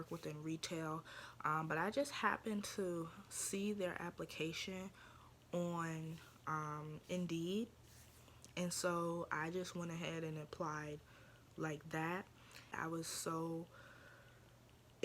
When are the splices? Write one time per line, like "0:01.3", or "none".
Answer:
0:12.7